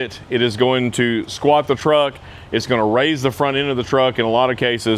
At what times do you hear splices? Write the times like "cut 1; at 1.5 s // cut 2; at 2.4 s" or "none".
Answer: none